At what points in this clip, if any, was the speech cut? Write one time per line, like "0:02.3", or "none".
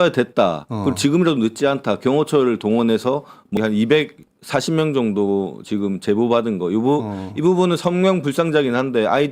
0:03.6